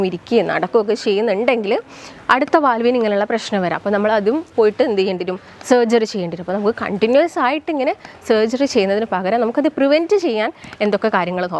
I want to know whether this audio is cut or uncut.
uncut